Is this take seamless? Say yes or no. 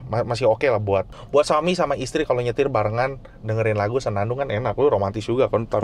yes